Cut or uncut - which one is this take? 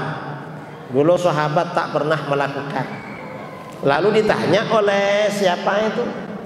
uncut